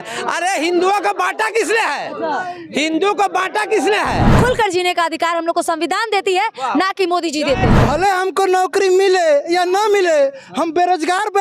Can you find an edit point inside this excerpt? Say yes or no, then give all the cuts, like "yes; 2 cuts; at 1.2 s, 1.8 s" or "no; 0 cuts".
yes; 2 cuts; at 4.2 s, 7.7 s